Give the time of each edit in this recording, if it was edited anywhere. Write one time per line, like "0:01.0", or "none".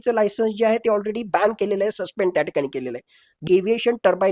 0:03.4

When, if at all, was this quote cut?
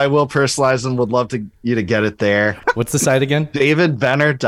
0:02.6

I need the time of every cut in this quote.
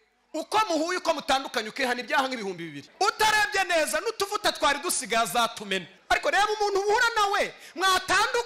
0:02.8
0:05.9

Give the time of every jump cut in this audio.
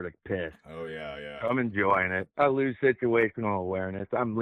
none

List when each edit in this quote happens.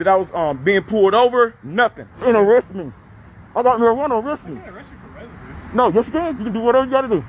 0:02.1

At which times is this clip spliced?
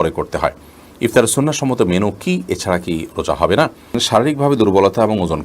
0:04.0

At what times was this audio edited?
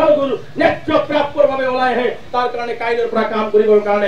none

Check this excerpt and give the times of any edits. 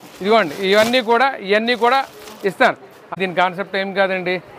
0:03.1

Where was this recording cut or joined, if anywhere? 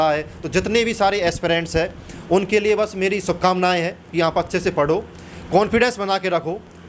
none

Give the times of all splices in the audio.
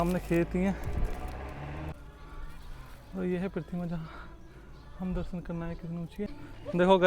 0:01.9
0:06.3

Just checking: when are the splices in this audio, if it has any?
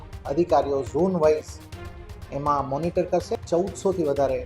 0:03.3

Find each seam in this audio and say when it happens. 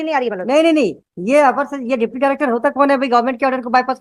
none

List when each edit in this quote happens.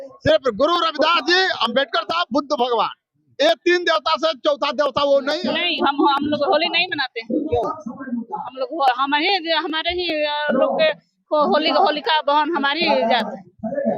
0:05.4

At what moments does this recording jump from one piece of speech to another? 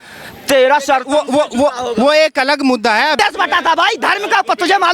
0:03.2

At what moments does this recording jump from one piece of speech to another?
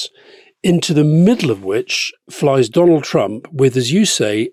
none

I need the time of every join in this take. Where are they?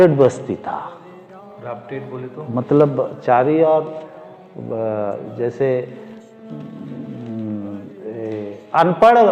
none

